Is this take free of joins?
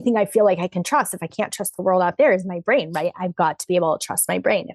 yes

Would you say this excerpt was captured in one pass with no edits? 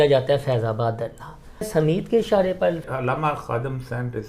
no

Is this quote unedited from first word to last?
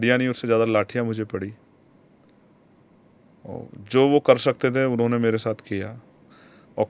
yes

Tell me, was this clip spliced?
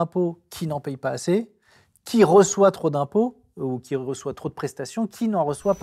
no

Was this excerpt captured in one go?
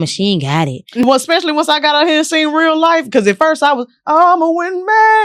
no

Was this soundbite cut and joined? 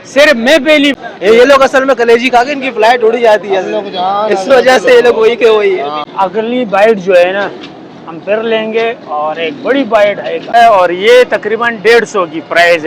yes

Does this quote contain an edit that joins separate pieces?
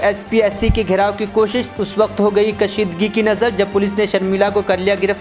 no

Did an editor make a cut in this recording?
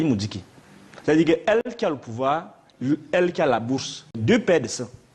yes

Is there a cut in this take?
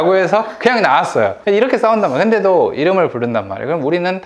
yes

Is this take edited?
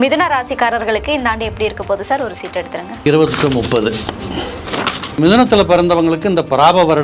yes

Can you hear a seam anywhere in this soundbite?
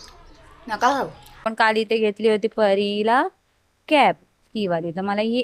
yes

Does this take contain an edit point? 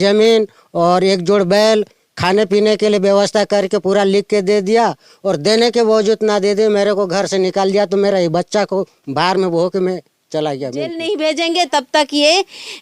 yes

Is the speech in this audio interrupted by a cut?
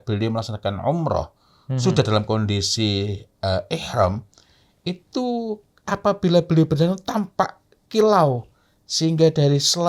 no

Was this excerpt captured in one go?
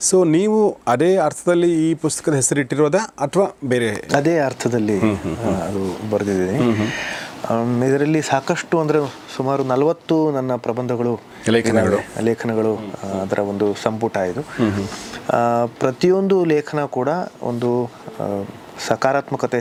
yes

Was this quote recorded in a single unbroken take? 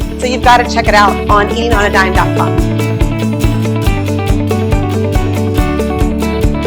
no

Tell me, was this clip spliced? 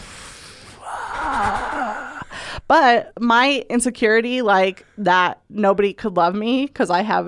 yes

